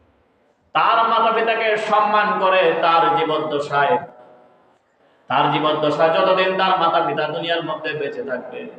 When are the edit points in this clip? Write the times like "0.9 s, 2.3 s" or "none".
4.0 s